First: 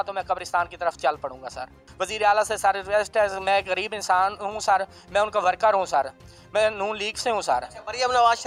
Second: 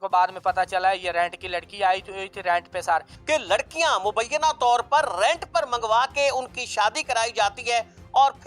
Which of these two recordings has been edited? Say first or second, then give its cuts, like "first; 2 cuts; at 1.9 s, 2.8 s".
second; 1 cut; at 3.1 s